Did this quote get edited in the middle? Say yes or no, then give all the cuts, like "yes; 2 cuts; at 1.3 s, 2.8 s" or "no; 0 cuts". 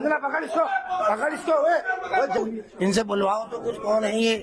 yes; 1 cut; at 2.4 s